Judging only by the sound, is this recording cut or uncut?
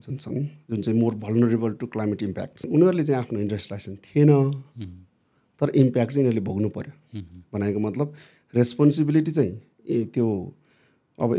cut